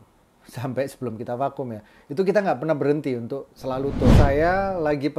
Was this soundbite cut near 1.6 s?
no; 1 cut; at 4.1 s

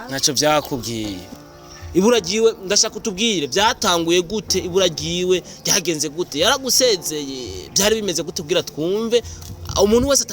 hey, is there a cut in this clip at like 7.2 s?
no; 1 cut; at 1.3 s

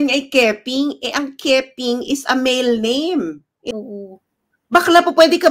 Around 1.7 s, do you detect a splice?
no; 1 cut; at 3.6 s

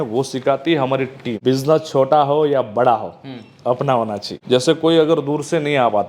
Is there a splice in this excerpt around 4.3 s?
yes; 2 cuts; at 1.3 s, 4.3 s

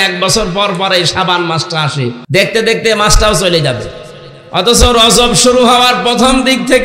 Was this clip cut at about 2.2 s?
yes; 1 cut; at 2.2 s

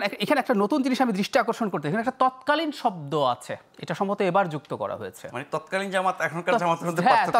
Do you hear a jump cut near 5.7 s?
no; 0 cuts

